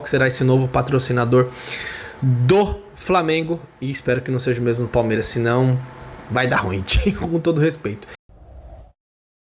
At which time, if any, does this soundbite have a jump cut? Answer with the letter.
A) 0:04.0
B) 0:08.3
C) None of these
B